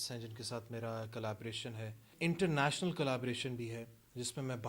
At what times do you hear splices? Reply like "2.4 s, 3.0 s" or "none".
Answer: 2.1 s